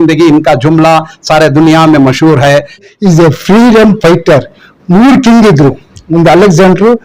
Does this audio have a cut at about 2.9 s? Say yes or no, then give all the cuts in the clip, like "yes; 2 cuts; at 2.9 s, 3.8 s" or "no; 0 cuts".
yes; 1 cut; at 2.9 s